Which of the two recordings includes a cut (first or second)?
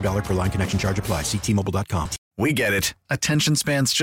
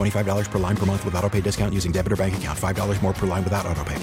first